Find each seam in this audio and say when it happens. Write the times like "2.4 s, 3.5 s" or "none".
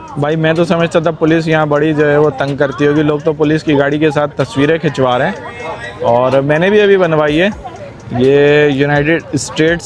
none